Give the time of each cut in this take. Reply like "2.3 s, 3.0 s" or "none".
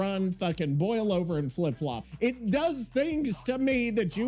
2.0 s